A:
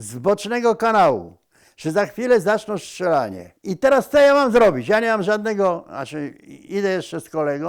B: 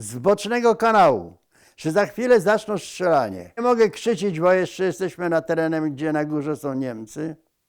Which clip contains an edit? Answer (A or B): B